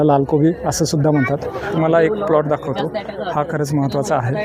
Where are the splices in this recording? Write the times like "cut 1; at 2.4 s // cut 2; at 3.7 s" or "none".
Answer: cut 1; at 1.6 s